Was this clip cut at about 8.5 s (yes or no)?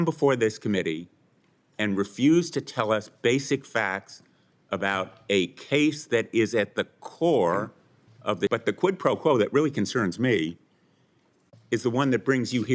yes